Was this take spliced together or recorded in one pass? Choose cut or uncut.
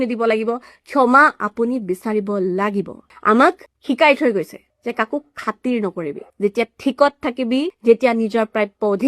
cut